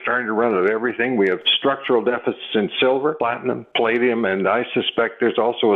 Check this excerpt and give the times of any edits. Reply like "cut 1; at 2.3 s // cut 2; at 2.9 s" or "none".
cut 1; at 1.5 s // cut 2; at 3.2 s